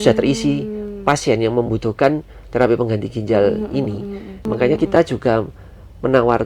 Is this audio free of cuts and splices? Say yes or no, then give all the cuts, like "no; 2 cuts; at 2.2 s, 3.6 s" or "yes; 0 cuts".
no; 1 cut; at 4.4 s